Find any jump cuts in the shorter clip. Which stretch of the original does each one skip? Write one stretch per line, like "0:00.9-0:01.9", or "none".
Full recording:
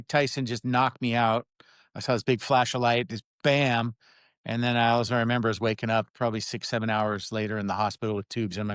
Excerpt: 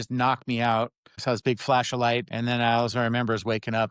0:01.6-0:01.9
0:03.1-0:04.4